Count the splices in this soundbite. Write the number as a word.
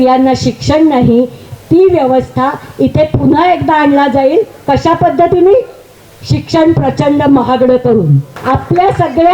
one